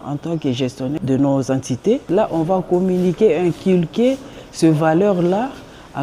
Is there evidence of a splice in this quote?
yes; 2 cuts; at 0.9 s, 2.0 s

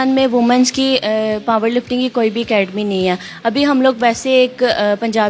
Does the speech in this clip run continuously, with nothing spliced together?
yes; 0 cuts

